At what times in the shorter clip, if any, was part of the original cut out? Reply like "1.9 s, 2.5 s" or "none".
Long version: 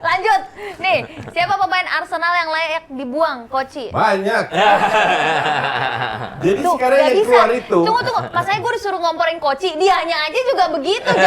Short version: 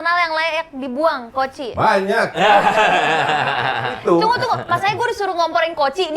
4.0 s